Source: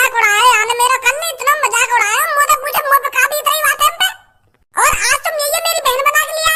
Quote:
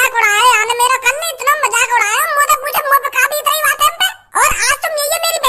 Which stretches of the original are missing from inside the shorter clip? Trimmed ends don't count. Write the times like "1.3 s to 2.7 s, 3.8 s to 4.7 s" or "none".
4.1 s to 4.5 s